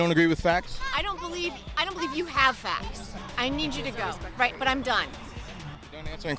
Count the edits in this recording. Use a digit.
0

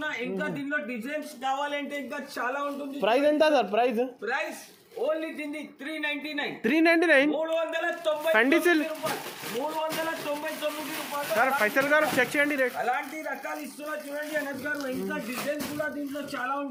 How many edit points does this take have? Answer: 0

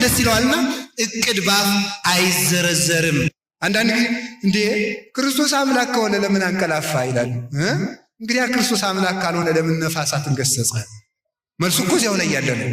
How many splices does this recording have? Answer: 1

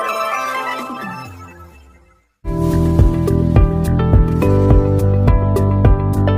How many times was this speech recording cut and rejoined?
1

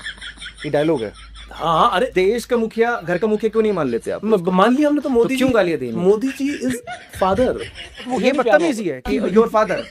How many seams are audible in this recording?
1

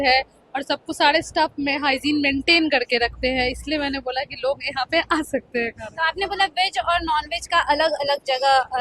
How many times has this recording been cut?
0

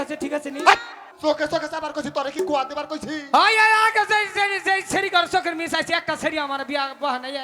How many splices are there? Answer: 1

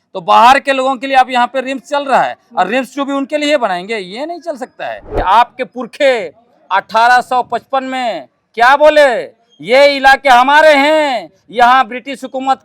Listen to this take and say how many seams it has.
1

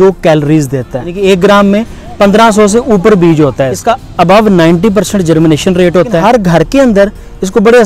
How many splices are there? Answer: 3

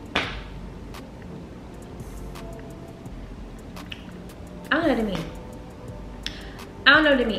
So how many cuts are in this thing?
0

